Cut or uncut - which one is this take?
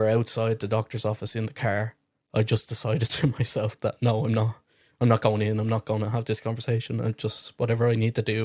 uncut